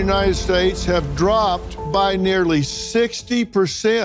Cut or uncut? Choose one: uncut